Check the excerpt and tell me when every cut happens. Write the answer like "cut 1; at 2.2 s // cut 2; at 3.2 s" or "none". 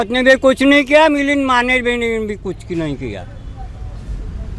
none